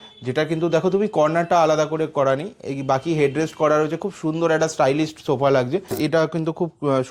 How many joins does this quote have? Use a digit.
1